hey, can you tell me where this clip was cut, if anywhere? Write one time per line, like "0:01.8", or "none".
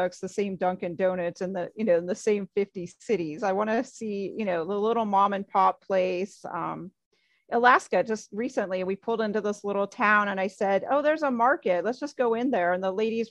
none